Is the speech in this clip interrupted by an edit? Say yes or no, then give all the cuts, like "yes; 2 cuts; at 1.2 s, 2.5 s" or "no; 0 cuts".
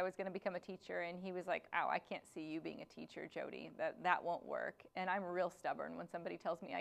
no; 0 cuts